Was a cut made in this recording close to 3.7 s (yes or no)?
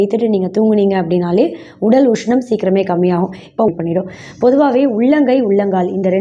yes